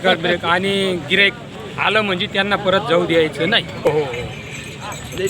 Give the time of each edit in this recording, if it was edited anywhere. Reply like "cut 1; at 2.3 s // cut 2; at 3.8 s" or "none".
cut 1; at 3.9 s